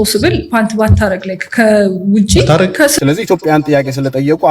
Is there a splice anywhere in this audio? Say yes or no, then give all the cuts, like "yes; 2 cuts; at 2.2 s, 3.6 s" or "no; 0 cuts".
yes; 1 cut; at 2.9 s